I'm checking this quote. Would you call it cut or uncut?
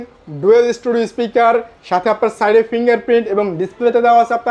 uncut